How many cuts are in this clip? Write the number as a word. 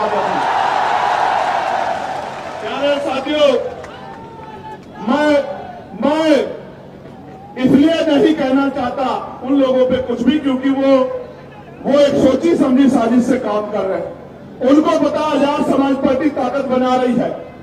zero